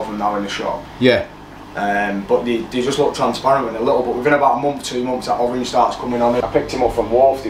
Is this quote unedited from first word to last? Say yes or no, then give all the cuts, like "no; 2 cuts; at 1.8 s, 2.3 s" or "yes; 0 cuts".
no; 1 cut; at 6.4 s